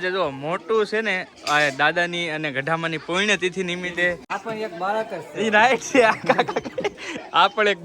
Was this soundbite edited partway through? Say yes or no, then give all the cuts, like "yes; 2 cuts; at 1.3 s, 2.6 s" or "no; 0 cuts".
yes; 1 cut; at 4.3 s